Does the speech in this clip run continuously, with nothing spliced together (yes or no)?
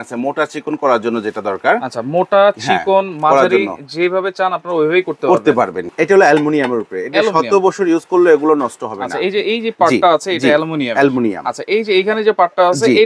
no